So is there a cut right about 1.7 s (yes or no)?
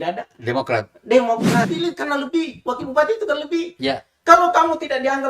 yes